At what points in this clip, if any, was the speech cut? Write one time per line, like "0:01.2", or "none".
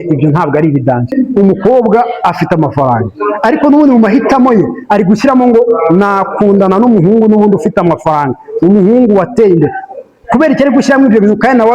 0:01.1